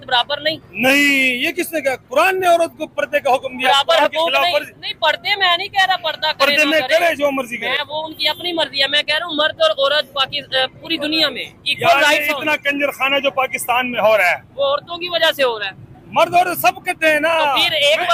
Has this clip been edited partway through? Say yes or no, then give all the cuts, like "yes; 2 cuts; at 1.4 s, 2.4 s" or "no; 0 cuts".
no; 0 cuts